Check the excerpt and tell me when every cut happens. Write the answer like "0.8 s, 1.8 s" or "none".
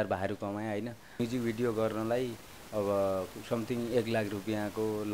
1.2 s